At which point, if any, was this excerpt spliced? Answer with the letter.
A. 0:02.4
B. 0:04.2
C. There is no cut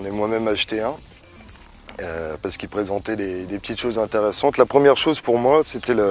B